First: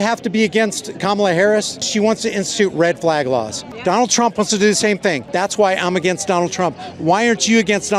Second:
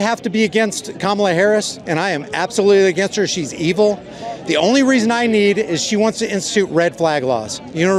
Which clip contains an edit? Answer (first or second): first